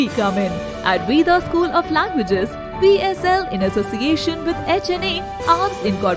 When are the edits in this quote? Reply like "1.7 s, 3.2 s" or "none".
none